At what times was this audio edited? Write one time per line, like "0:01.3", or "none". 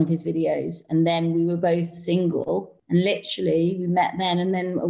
0:02.8